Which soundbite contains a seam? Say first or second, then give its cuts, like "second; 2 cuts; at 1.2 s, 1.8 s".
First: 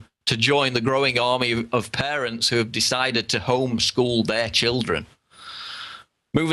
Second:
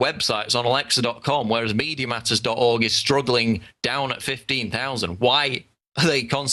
second; 1 cut; at 2.4 s